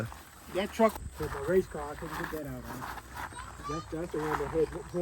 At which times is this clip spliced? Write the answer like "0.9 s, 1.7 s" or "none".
0.9 s